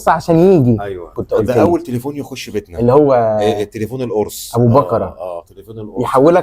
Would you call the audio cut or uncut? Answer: cut